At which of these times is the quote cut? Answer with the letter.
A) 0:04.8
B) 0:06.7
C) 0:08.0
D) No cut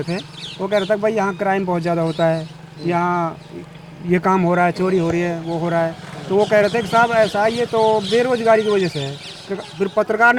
D